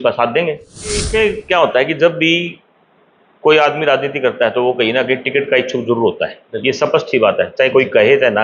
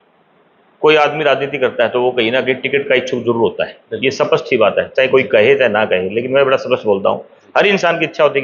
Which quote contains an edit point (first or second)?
first